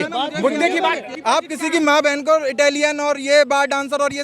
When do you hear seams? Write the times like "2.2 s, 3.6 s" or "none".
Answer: 1.1 s